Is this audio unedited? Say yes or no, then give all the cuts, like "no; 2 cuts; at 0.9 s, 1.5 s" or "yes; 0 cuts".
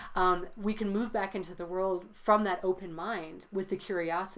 yes; 0 cuts